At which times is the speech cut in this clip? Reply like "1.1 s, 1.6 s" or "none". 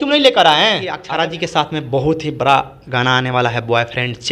1.0 s

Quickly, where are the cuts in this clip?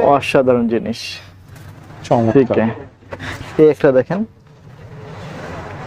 none

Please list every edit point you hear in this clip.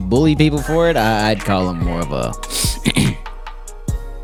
none

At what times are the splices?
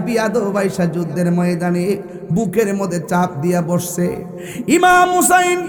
none

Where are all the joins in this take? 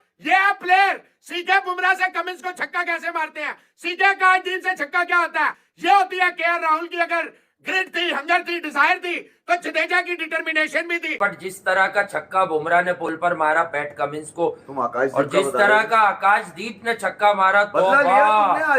11.2 s

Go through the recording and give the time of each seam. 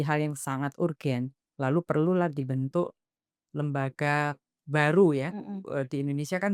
none

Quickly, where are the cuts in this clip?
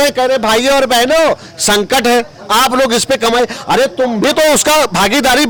none

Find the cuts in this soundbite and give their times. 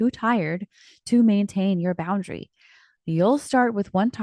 none

